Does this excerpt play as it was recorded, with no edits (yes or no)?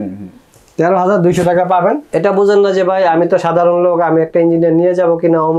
no